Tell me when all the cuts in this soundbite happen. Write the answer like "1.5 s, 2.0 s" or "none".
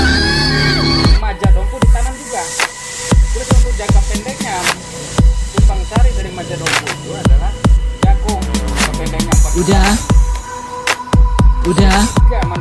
none